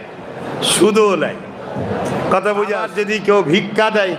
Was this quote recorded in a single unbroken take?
no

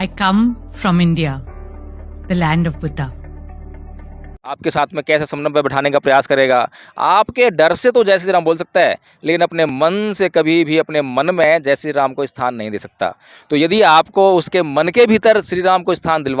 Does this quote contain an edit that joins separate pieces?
yes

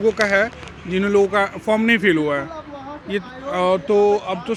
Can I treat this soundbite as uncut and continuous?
yes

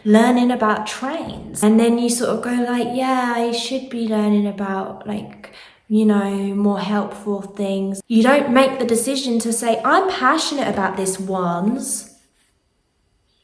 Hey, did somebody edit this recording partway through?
yes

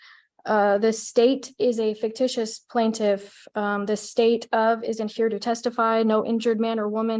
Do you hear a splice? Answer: no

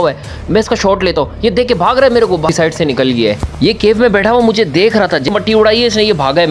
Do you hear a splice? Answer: yes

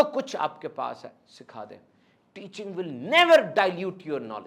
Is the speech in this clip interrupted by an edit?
no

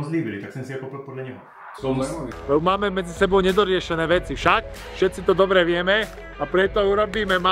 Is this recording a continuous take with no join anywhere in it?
yes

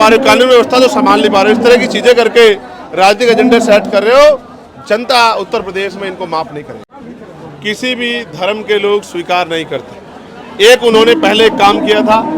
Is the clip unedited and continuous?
no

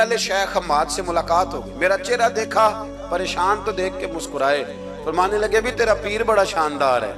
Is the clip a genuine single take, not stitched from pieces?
yes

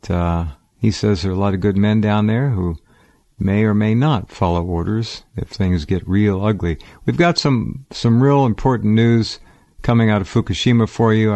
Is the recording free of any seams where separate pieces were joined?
no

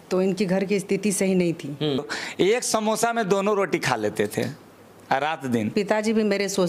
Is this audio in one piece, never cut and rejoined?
no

